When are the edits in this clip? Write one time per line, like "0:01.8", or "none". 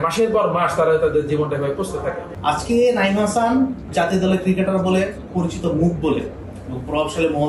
0:02.3
0:03.9
0:05.2